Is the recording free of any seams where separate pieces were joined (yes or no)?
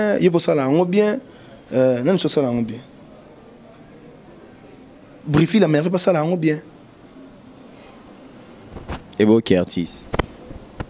yes